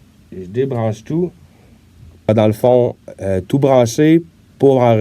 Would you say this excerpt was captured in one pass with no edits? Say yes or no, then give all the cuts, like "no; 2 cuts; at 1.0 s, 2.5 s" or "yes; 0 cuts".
no; 1 cut; at 2.3 s